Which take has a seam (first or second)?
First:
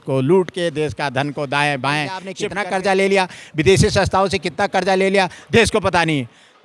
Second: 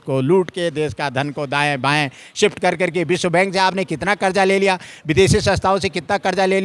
first